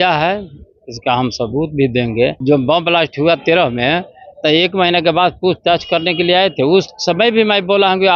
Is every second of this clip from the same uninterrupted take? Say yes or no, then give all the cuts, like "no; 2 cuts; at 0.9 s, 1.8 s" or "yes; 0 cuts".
no; 1 cut; at 2.4 s